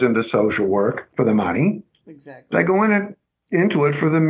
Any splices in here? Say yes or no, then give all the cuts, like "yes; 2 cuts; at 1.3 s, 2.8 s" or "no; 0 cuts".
yes; 1 cut; at 1.0 s